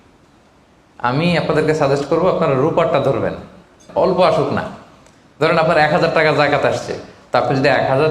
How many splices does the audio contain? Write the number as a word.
one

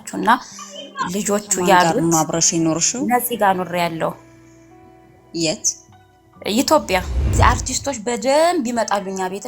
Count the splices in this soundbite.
one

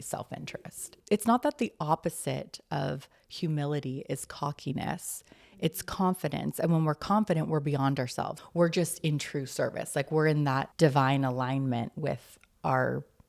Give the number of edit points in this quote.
three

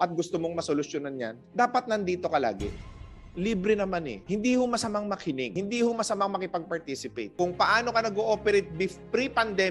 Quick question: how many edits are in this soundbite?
four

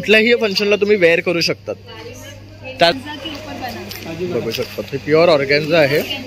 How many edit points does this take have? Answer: one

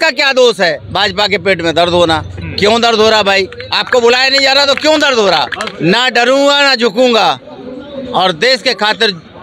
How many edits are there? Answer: two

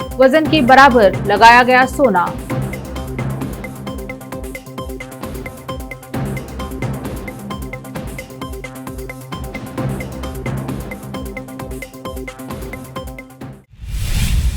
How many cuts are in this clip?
one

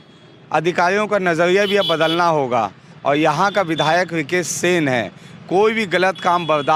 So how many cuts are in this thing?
zero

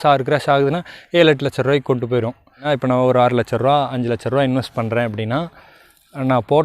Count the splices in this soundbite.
one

